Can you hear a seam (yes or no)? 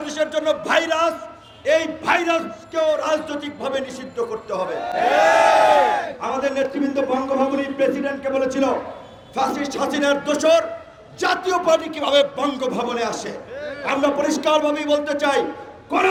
no